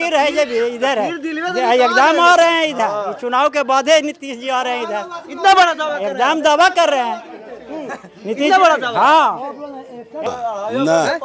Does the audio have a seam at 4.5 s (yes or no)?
no